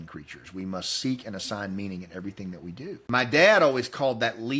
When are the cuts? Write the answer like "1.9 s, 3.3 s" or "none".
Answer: 3.0 s